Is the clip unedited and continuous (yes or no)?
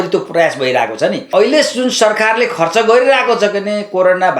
no